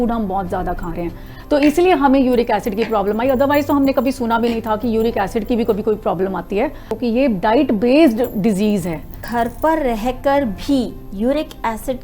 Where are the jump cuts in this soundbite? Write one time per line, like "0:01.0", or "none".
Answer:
0:07.0
0:09.2